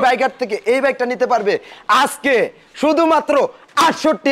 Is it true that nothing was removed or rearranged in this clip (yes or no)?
yes